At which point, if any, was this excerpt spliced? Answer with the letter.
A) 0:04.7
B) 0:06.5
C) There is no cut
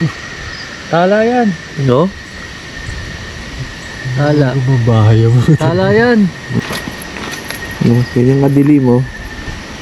B